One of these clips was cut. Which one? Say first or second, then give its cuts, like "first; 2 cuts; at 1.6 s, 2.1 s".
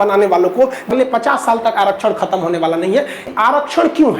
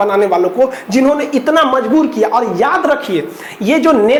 first; 2 cuts; at 0.9 s, 3.2 s